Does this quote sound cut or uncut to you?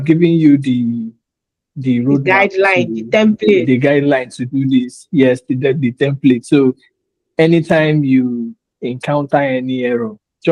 uncut